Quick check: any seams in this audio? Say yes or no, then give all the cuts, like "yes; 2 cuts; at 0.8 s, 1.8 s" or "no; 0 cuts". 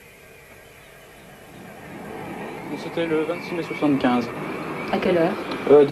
yes; 1 cut; at 4.7 s